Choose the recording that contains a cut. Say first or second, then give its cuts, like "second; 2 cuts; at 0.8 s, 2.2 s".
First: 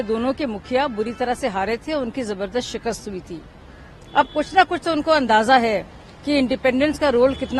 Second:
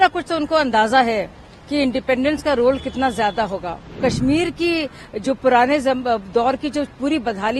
second; 1 cut; at 4.0 s